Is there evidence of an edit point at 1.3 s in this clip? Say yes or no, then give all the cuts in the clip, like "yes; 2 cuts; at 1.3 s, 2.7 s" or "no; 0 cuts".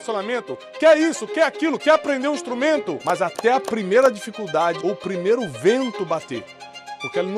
no; 2 cuts; at 3.0 s, 4.8 s